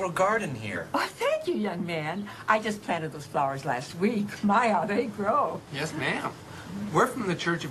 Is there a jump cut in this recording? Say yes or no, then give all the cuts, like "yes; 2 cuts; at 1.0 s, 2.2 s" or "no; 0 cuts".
no; 0 cuts